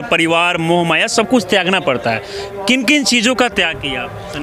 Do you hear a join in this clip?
no; 0 cuts

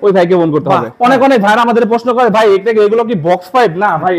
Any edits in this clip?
yes; 1 cut; at 0.9 s

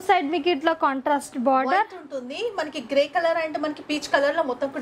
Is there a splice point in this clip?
no; 0 cuts

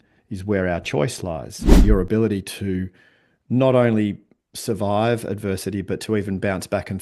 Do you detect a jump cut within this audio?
yes; 1 cut; at 1.8 s

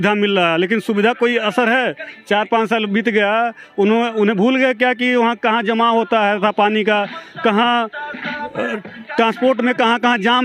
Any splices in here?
no; 0 cuts

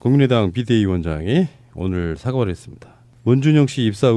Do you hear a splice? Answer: no; 0 cuts

